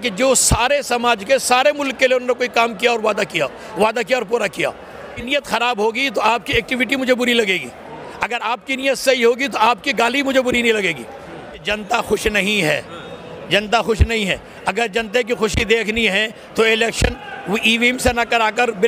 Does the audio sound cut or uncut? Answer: cut